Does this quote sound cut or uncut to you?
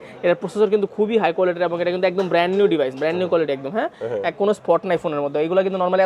uncut